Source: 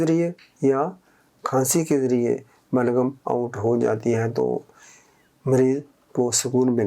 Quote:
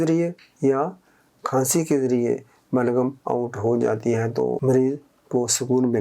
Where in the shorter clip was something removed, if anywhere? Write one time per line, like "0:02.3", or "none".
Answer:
0:04.6